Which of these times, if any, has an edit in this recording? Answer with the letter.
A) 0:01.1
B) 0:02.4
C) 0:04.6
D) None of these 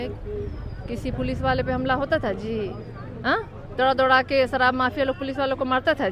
D